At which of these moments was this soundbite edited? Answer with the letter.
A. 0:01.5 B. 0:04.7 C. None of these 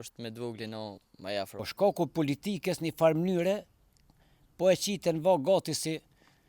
A